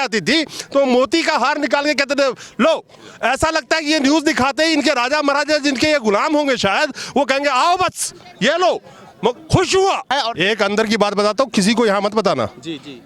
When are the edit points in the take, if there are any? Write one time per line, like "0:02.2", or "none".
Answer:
0:10.1